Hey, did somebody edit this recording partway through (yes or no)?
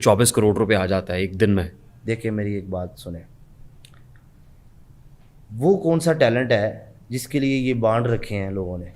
no